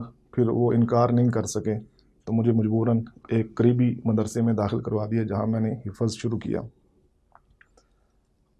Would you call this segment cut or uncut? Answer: uncut